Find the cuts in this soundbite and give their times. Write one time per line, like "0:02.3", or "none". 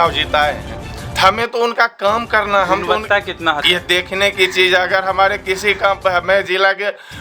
0:03.6